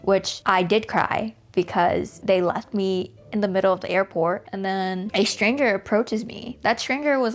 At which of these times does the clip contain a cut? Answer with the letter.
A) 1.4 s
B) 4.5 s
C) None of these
C